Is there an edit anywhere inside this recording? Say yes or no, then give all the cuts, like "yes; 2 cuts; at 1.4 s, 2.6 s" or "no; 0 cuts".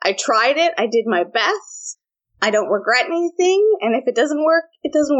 no; 0 cuts